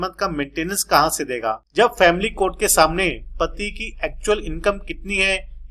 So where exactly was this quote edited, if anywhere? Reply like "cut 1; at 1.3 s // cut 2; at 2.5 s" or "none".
cut 1; at 1.6 s

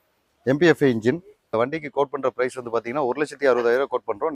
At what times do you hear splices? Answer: cut 1; at 1.4 s

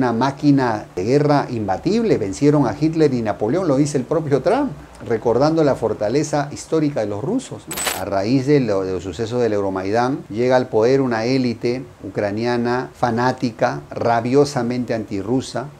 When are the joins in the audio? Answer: cut 1; at 7.9 s

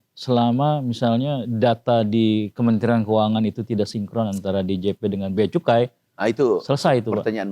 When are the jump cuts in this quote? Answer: none

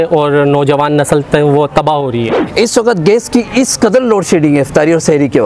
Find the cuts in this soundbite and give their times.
cut 1; at 2.4 s

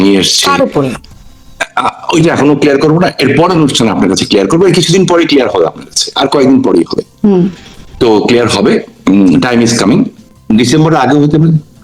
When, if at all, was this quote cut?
cut 1; at 10.3 s

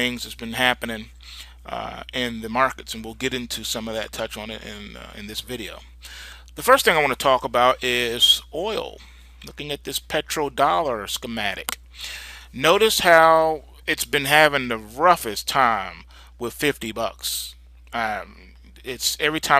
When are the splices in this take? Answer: cut 1; at 4.8 s

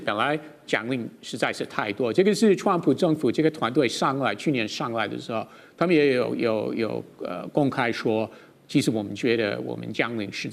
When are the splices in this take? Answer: none

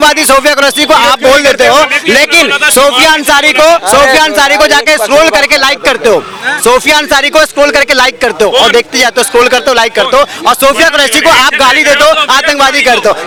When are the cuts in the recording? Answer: none

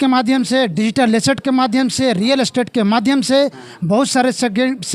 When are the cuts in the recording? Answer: none

